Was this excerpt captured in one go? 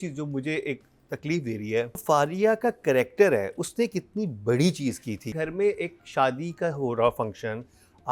no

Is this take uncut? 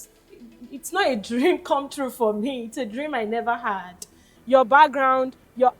no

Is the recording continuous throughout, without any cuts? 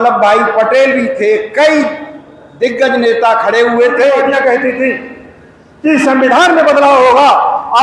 no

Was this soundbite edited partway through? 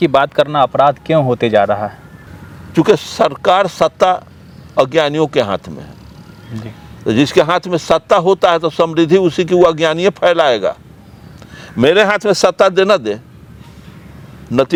no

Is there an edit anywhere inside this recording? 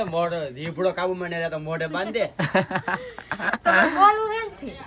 no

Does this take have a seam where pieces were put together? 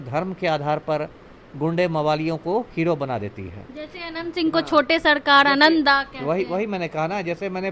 no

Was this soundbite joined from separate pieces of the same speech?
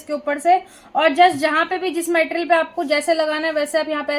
no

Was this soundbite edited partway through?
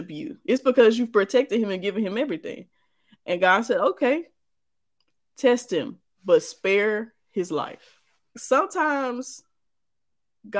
yes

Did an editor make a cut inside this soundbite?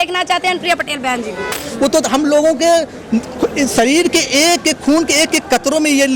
yes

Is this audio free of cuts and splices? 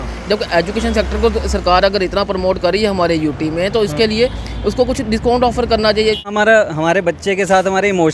no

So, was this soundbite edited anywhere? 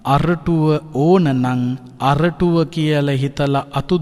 yes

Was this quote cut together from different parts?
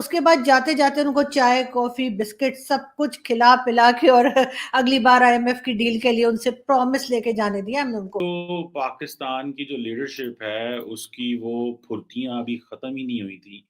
yes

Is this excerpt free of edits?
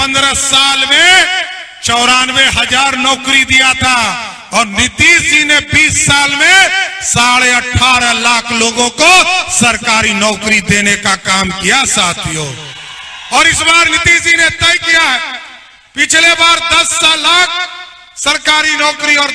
yes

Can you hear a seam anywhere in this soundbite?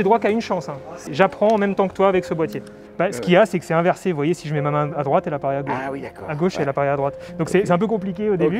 yes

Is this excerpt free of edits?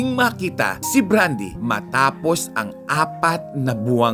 yes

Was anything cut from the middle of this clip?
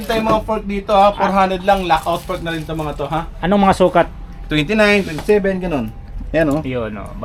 no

